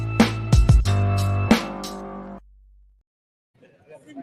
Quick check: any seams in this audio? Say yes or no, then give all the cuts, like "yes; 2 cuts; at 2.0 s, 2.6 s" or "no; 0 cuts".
no; 0 cuts